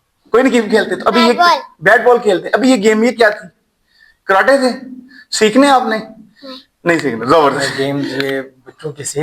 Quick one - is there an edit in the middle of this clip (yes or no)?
yes